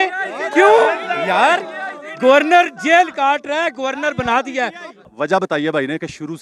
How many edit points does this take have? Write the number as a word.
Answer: one